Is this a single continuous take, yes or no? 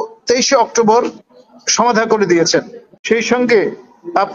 no